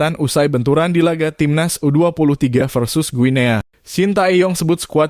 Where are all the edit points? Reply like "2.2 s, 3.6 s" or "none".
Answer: 3.8 s